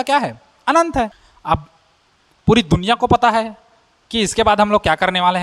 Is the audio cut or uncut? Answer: cut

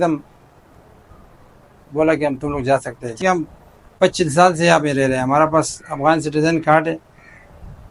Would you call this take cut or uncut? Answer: cut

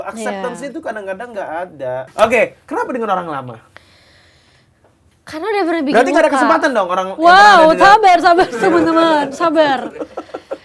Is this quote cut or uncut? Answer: cut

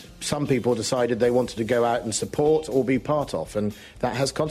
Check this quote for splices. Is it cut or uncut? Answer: uncut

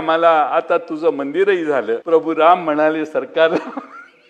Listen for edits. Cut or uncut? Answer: cut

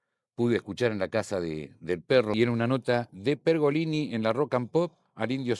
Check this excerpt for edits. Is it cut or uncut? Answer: cut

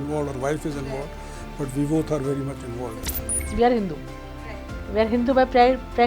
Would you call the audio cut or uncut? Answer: cut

